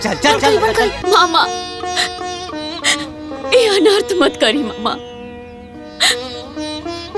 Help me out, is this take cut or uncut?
cut